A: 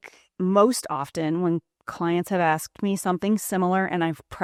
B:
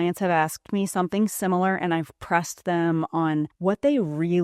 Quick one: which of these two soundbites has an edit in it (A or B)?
B